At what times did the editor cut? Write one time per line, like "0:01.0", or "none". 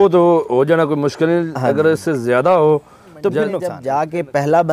0:03.8